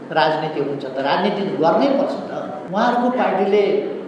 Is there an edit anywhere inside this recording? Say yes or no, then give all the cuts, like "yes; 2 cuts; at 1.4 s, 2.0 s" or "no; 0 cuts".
yes; 1 cut; at 2.6 s